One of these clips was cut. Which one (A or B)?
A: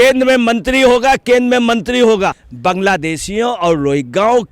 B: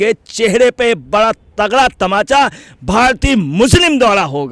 A